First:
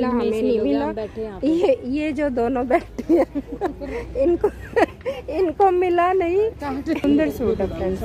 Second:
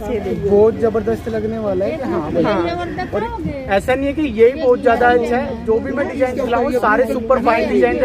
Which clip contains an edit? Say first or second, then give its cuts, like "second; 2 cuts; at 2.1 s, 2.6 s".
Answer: first; 1 cut; at 7.0 s